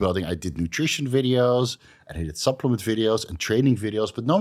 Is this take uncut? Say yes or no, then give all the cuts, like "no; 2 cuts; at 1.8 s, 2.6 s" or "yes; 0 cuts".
yes; 0 cuts